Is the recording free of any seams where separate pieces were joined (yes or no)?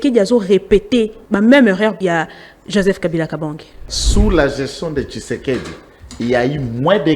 no